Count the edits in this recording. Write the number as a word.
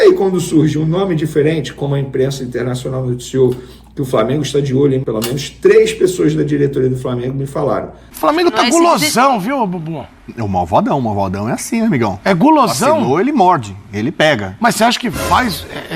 two